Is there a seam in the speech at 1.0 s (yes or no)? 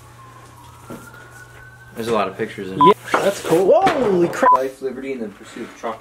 no